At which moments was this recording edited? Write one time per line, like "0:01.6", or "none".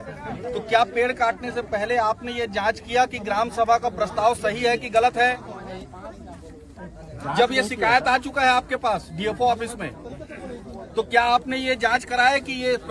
none

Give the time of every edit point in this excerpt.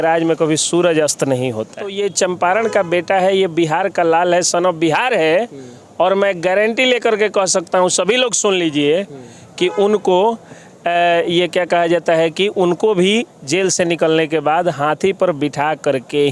0:01.9

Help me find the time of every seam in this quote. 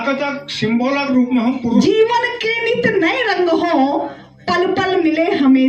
0:01.8

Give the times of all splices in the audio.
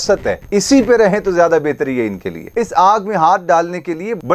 0:02.4

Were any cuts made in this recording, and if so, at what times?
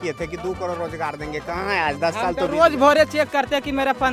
none

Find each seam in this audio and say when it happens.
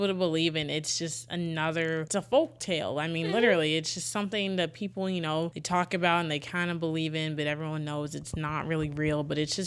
0:02.1
0:05.6

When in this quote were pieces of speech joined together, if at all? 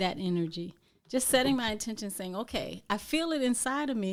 none

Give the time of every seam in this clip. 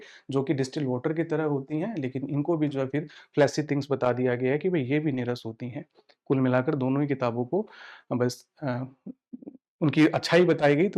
none

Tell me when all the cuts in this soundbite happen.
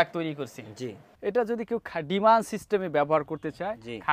0:01.1

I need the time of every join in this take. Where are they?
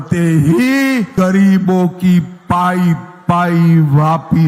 0:01.1

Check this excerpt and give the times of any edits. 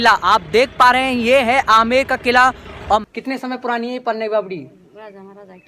0:03.0

